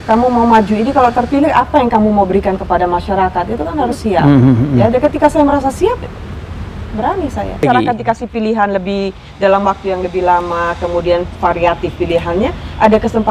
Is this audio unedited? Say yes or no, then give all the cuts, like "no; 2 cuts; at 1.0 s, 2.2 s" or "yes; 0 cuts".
no; 1 cut; at 7.6 s